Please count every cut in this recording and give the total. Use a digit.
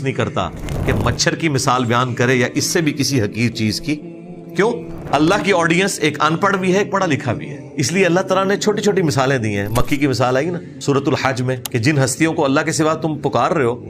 4